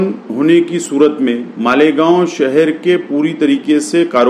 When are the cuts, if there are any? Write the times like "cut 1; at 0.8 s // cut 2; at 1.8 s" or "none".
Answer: cut 1; at 1.5 s